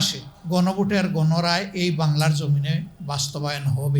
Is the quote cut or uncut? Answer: uncut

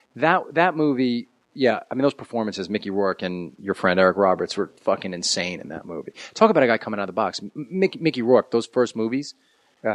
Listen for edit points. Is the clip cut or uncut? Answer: cut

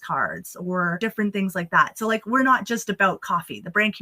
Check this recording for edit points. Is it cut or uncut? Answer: cut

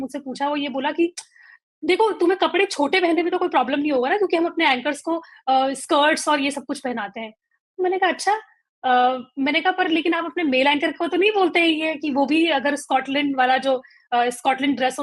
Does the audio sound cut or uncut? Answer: uncut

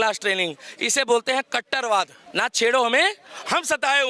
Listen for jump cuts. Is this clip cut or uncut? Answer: cut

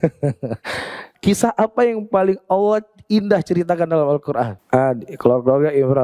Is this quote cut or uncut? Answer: cut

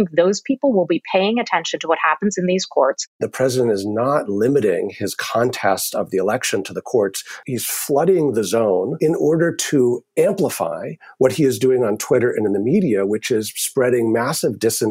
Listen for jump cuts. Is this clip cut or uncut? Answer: cut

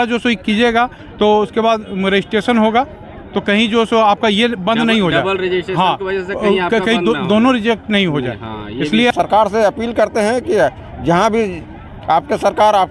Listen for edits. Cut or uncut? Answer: cut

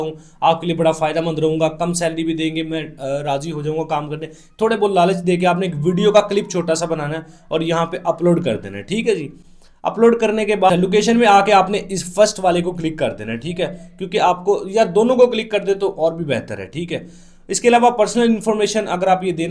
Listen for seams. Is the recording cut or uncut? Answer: uncut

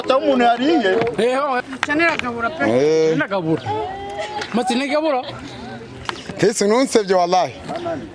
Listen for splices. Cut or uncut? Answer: cut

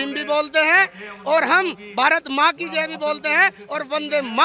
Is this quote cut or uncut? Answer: uncut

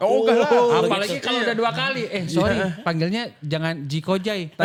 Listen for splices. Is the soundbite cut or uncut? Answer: uncut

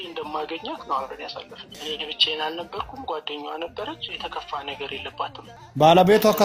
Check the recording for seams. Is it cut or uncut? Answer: cut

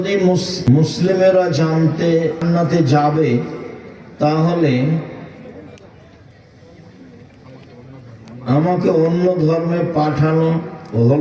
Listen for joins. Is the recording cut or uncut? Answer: cut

